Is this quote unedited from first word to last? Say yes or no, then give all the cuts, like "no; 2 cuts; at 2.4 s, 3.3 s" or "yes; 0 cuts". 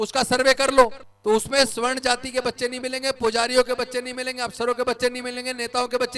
no; 1 cut; at 1.1 s